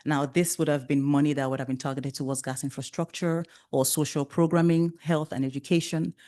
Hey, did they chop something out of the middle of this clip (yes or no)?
no